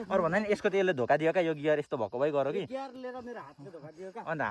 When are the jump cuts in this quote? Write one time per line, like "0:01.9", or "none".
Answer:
none